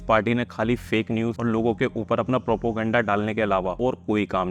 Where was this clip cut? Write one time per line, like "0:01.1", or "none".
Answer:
0:01.4
0:03.8